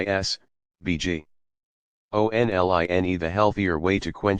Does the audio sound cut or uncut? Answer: cut